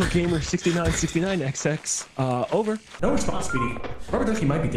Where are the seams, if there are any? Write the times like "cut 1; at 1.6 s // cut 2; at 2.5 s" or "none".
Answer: cut 1; at 2.9 s